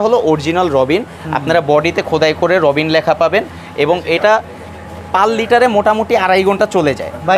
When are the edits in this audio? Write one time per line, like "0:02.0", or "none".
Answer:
none